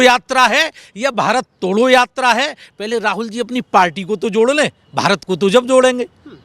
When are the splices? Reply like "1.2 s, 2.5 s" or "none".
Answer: none

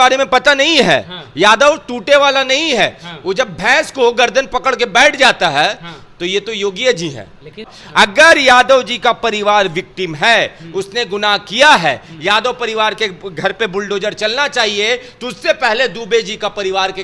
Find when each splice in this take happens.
7.8 s

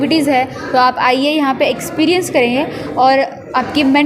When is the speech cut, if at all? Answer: none

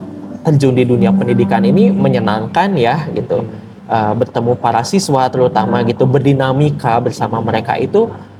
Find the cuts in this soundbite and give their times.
none

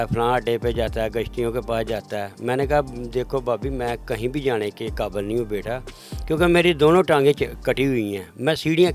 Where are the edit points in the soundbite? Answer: none

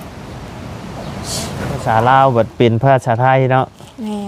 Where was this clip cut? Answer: 1.8 s

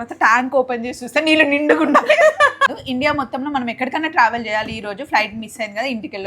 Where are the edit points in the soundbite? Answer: 2.7 s

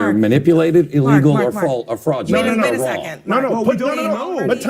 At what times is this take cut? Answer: none

